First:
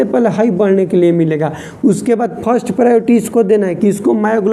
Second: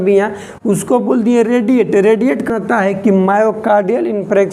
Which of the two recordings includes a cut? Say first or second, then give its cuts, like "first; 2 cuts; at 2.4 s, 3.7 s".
second; 1 cut; at 2.5 s